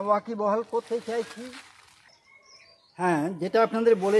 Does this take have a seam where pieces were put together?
yes; 1 cut; at 2.2 s

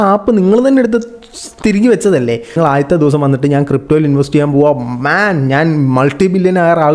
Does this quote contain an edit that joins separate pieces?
yes; 1 cut; at 2.5 s

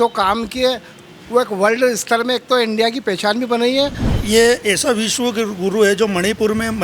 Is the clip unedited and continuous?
no; 1 cut; at 4.1 s

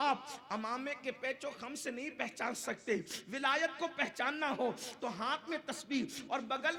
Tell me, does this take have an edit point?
yes; 1 cut; at 3.6 s

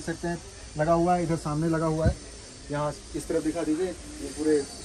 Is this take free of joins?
yes; 0 cuts

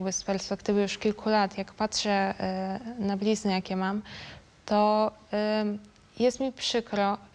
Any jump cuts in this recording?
no; 0 cuts

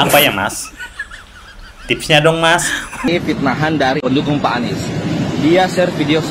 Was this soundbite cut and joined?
yes; 1 cut; at 3.1 s

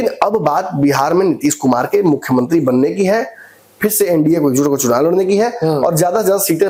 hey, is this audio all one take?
yes; 0 cuts

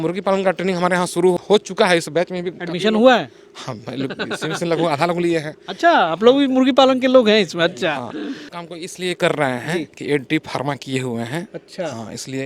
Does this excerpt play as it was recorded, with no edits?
no; 2 cuts; at 1.4 s, 8.5 s

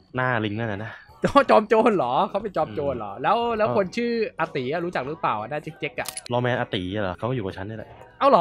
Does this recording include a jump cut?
yes; 2 cuts; at 6.2 s, 7.2 s

